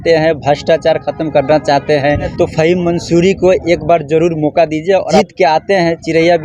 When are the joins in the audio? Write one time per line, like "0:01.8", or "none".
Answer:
0:02.3
0:05.2